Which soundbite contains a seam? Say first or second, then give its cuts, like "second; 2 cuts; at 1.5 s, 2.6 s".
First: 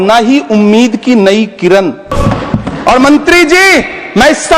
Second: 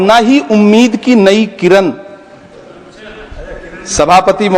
first; 1 cut; at 2.1 s